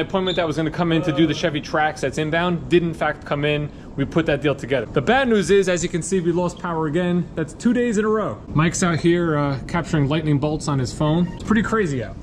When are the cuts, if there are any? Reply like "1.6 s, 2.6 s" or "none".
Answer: 4.9 s, 8.4 s, 11.4 s